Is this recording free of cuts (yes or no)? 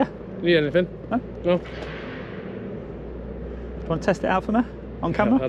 yes